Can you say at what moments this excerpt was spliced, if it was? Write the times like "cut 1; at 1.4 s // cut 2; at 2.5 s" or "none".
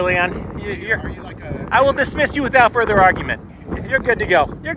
none

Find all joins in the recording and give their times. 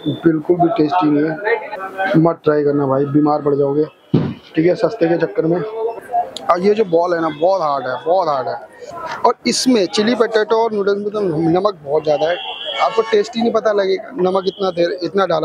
cut 1; at 1.7 s // cut 2; at 5.9 s // cut 3; at 8.8 s

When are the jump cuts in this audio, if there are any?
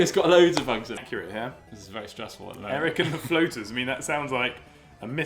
cut 1; at 0.9 s

